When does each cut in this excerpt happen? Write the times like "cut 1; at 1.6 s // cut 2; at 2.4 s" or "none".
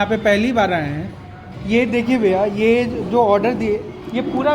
none